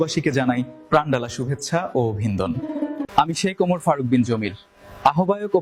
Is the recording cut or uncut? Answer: uncut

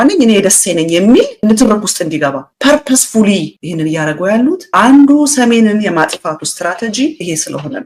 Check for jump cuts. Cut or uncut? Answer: uncut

